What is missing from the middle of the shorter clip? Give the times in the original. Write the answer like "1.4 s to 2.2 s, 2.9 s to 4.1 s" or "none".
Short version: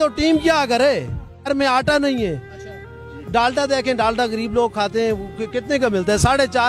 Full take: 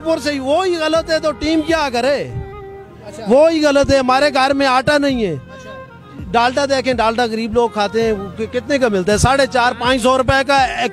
2.7 s to 4.5 s